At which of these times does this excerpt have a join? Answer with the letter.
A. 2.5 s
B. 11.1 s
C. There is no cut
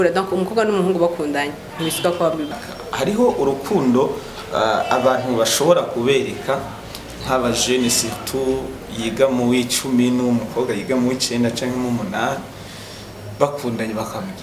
A